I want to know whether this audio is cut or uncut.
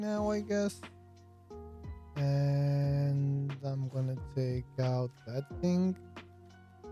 cut